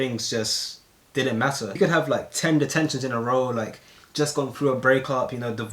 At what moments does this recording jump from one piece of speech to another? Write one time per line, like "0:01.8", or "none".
0:01.8